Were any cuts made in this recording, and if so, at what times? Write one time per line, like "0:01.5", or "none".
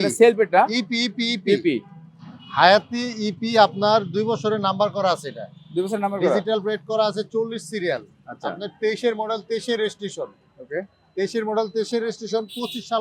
none